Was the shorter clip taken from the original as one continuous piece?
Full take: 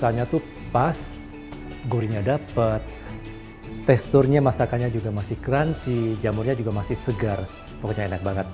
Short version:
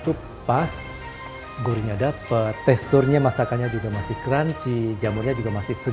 no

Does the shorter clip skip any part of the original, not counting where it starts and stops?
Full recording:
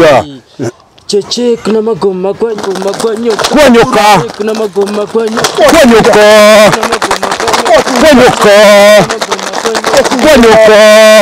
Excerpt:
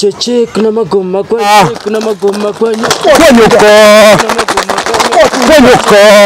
yes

